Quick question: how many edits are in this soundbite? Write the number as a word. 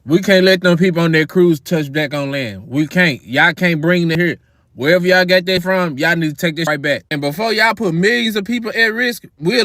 three